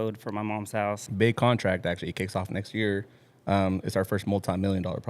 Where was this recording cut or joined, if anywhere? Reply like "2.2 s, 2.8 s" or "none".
1.0 s

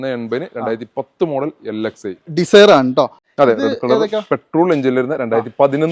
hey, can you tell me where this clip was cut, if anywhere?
3.2 s

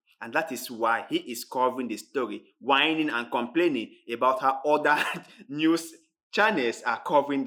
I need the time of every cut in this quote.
none

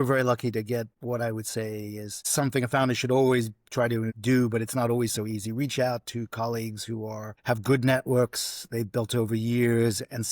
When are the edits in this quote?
1.0 s, 2.2 s, 4.1 s

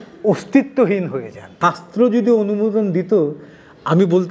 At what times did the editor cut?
1.5 s

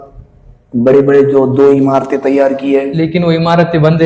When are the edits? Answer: none

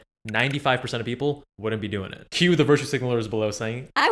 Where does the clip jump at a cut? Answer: 2.2 s

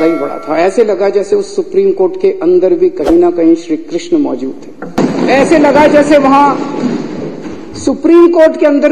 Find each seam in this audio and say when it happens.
5.0 s

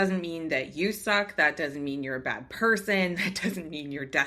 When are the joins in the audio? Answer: none

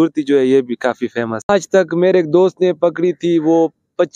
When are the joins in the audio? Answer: 1.5 s

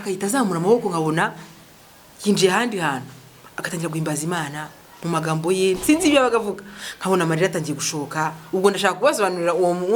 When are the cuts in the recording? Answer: none

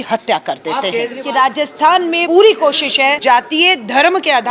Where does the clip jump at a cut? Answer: 1.2 s, 2.2 s, 3.2 s

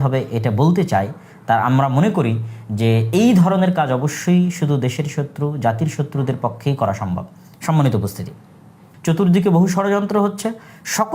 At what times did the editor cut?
8.9 s

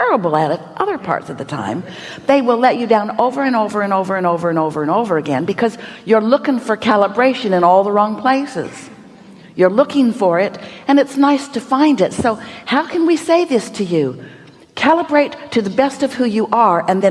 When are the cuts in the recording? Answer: none

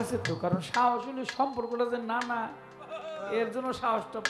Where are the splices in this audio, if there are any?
none

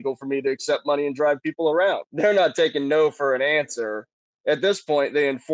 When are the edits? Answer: 2.1 s

